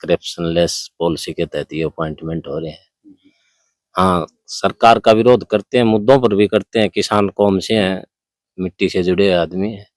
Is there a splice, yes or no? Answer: no